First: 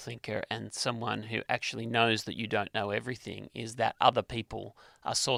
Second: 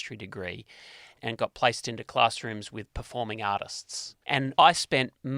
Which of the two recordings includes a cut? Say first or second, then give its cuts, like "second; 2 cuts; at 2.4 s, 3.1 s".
second; 2 cuts; at 1.2 s, 4.4 s